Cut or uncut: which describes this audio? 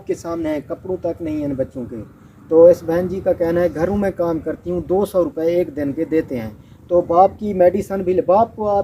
uncut